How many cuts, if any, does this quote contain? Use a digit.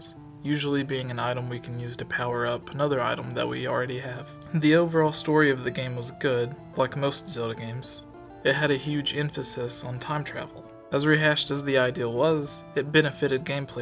0